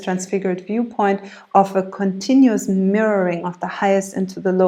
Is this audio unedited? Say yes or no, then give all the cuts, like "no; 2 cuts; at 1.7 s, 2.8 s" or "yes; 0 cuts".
yes; 0 cuts